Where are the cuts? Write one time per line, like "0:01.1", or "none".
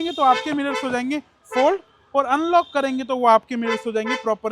none